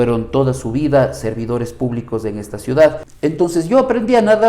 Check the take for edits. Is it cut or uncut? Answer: cut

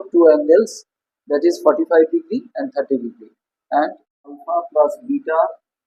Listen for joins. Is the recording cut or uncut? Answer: cut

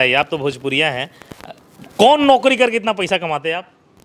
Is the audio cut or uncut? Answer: uncut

